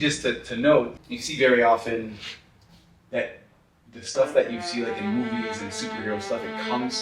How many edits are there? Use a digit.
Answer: 1